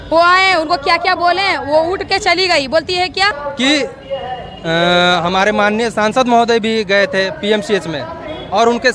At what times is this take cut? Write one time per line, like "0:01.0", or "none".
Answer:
0:03.4

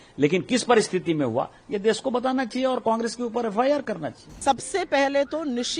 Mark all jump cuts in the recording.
0:04.4

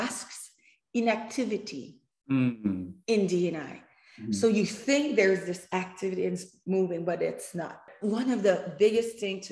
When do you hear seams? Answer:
0:07.8

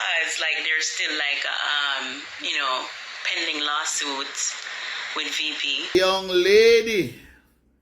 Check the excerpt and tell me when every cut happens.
0:05.9

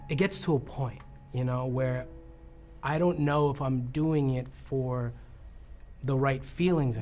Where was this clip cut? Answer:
none

